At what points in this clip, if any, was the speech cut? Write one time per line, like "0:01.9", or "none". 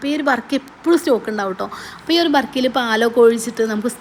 none